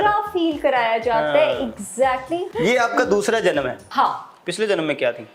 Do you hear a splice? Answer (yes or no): yes